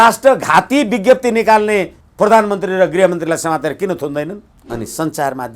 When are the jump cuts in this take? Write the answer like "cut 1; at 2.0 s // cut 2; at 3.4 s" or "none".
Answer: cut 1; at 2.0 s // cut 2; at 4.5 s